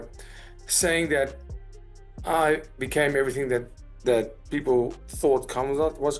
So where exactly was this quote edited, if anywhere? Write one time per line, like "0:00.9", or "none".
none